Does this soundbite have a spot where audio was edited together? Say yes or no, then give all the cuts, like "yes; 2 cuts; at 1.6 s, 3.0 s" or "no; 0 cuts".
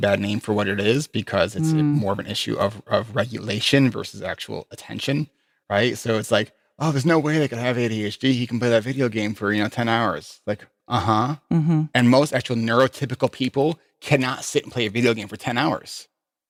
no; 0 cuts